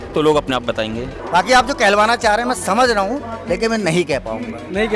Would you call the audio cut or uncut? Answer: cut